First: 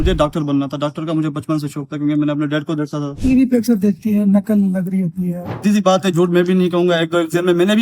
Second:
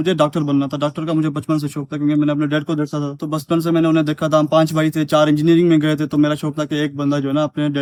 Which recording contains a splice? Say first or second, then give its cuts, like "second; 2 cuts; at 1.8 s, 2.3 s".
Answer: first; 2 cuts; at 3.2 s, 5.6 s